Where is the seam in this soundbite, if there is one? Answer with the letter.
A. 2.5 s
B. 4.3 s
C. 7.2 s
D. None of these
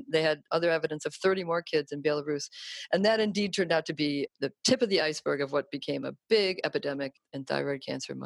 D